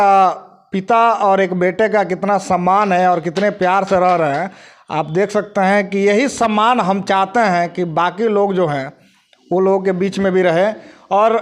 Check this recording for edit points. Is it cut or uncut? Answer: uncut